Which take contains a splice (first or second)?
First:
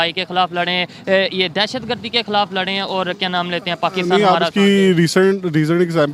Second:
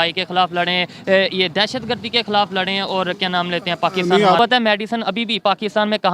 second